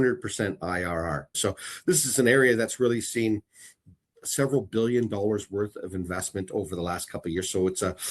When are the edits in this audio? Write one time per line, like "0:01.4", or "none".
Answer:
0:01.4